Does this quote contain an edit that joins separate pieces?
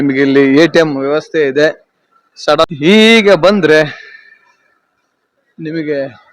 yes; 1 cut; at 2.7 s

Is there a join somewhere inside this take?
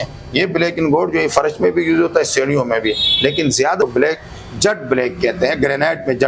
yes; 1 cut; at 3.8 s

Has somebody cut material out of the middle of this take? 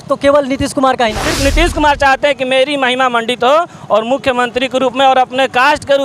yes; 1 cut; at 1.3 s

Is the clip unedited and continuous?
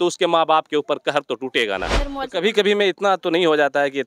no; 1 cut; at 2.0 s

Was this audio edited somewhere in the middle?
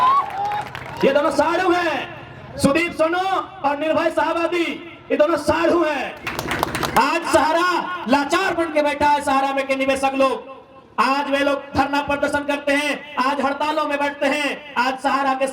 yes; 1 cut; at 6.2 s

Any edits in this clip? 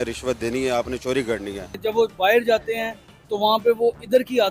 yes; 1 cut; at 1.7 s

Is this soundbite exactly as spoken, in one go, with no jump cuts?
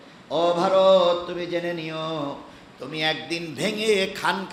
yes; 0 cuts

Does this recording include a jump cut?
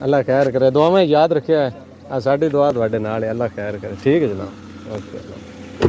no; 0 cuts

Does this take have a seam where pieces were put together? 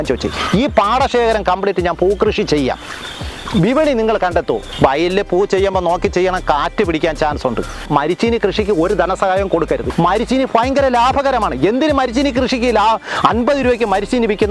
yes; 3 cuts; at 4.7 s, 7.8 s, 9.9 s

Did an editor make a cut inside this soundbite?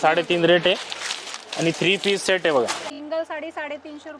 yes; 1 cut; at 2.9 s

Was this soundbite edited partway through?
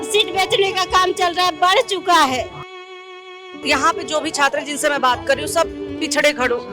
yes; 1 cut; at 3.0 s

